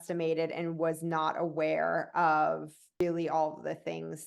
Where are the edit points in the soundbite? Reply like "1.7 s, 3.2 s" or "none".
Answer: 3.0 s